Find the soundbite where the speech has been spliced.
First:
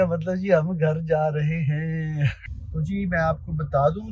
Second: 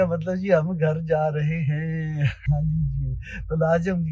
first; 1 cut; at 2.4 s

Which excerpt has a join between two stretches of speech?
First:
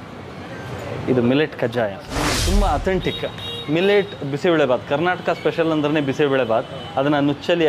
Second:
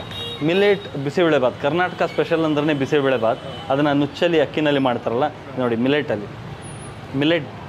first; 1 cut; at 2.4 s

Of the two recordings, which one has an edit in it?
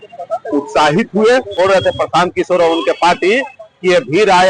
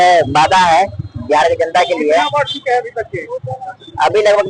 first; 1 cut; at 1.5 s

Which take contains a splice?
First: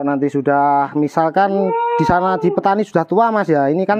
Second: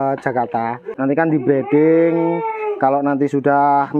second; 1 cut; at 0.9 s

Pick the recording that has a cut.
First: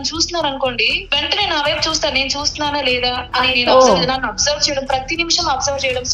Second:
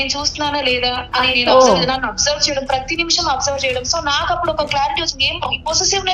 first; 1 cut; at 0.9 s

